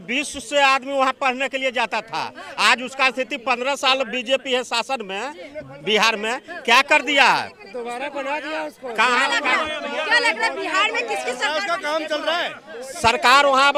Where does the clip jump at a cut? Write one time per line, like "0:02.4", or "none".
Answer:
none